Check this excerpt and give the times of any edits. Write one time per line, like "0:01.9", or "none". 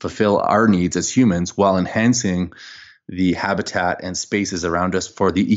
0:03.7